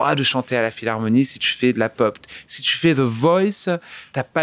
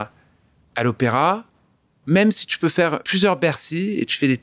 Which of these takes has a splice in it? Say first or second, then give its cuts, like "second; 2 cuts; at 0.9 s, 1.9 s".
second; 2 cuts; at 1.9 s, 3.0 s